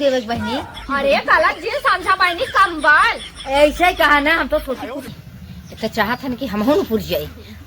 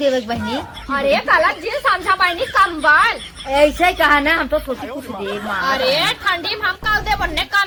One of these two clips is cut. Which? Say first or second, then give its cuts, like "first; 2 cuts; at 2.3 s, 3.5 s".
first; 1 cut; at 5.1 s